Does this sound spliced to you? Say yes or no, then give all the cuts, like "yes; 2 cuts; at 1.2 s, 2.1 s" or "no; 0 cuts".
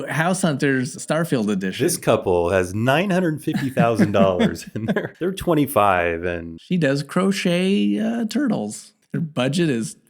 yes; 2 cuts; at 1.0 s, 6.5 s